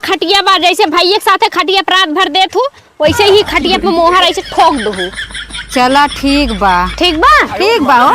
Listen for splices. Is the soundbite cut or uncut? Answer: uncut